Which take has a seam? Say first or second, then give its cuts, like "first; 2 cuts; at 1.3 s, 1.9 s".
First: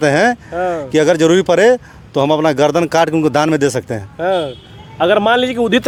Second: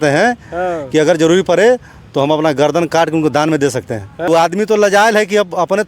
second; 1 cut; at 4.3 s